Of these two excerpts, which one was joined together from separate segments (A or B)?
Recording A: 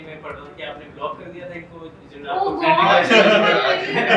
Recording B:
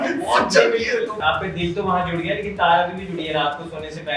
B